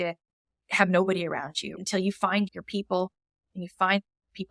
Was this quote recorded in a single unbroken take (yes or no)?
no